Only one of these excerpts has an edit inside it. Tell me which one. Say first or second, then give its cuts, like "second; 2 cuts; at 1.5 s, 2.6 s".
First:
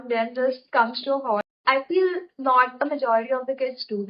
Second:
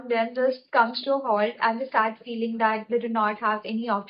first; 1 cut; at 1.4 s